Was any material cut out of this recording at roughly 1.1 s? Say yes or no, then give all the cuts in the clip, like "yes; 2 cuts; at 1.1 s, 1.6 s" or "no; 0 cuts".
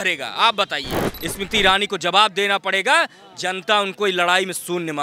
yes; 1 cut; at 1.1 s